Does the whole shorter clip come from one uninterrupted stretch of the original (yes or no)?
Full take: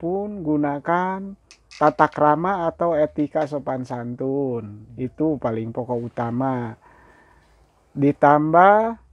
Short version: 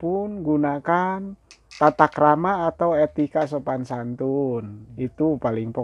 yes